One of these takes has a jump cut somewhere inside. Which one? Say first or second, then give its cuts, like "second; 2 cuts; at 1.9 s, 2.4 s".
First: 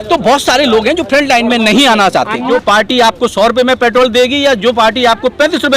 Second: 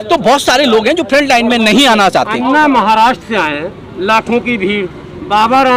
first; 1 cut; at 2.5 s